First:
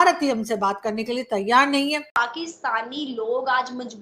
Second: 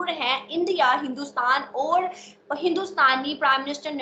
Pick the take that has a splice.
first; 1 cut; at 2.1 s

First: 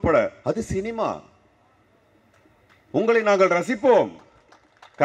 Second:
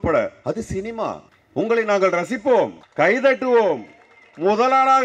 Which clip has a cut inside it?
second; 2 cuts; at 1.3 s, 2.8 s

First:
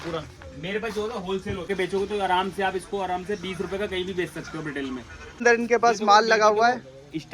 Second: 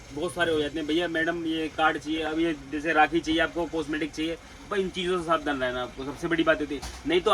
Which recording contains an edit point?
first; 2 cuts; at 1.7 s, 5.4 s

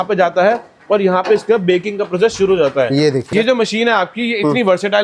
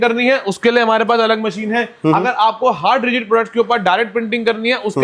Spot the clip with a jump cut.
first; 1 cut; at 3.3 s

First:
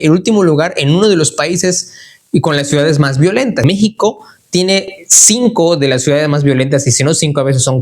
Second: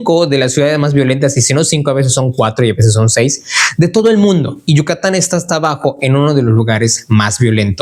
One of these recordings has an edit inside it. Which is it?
first; 1 cut; at 3.6 s

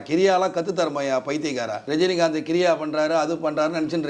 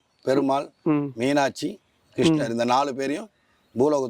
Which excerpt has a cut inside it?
first; 1 cut; at 1.8 s

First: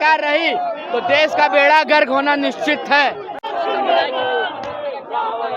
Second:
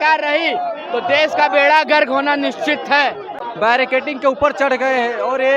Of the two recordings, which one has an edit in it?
second; 1 cut; at 3.4 s

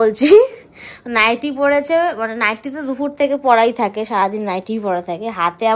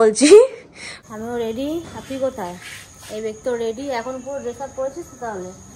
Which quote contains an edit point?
second; 1 cut; at 1.0 s

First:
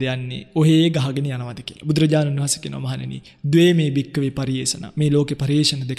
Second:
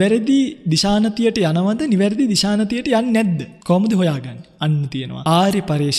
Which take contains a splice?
second; 2 cuts; at 3.5 s, 5.1 s

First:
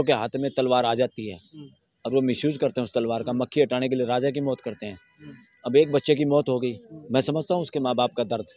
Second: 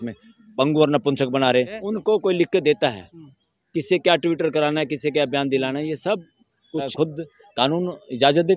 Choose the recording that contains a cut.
second; 2 cuts; at 1.8 s, 6.9 s

